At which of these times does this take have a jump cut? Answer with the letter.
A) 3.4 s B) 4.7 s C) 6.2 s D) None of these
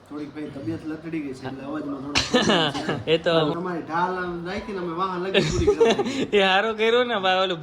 A